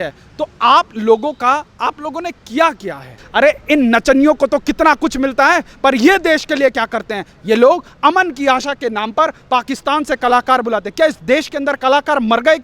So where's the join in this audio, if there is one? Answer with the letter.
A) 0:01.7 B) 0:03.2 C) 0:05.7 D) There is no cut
B